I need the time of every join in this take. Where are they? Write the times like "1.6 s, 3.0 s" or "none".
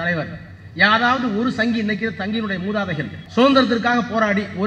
3.2 s